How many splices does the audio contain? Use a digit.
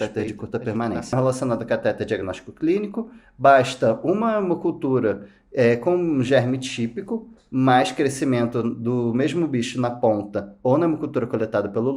1